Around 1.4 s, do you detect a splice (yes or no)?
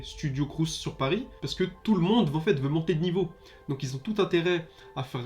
yes